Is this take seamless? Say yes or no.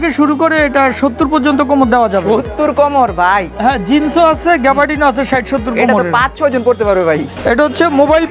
no